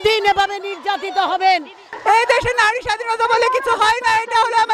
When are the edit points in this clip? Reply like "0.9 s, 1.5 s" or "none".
1.9 s